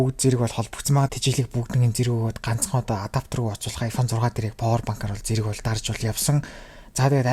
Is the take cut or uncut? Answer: cut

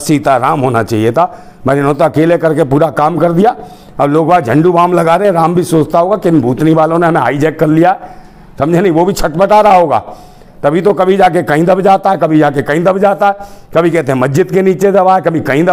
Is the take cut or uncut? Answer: uncut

